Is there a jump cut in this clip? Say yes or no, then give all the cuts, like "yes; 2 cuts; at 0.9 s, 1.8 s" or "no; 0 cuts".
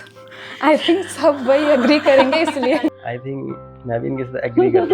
yes; 1 cut; at 2.9 s